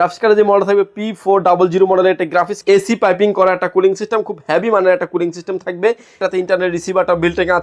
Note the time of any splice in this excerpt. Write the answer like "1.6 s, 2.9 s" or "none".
2.5 s, 6.2 s

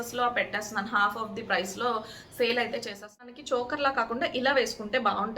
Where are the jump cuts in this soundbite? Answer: 3.3 s

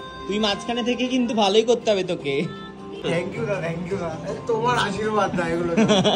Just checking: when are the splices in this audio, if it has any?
3.0 s

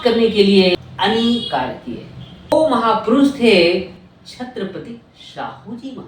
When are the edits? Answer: 0.7 s, 2.5 s

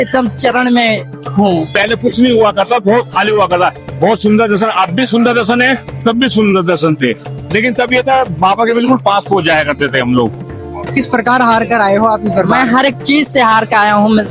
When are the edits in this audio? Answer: 1.7 s, 10.9 s

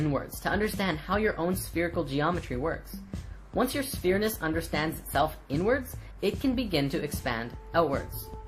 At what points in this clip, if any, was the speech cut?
none

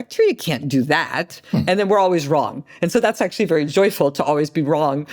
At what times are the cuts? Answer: none

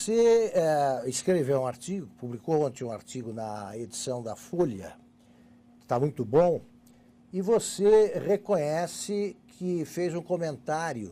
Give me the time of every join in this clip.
9.0 s

